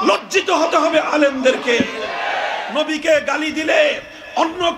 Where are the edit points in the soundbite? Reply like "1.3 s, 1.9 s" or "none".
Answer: 2.6 s